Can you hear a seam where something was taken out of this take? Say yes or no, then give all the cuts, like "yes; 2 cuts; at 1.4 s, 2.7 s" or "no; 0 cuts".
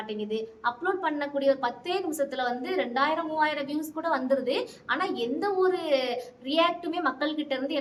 no; 0 cuts